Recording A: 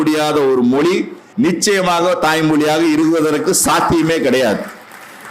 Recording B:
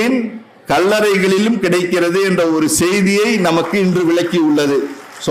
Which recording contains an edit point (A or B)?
A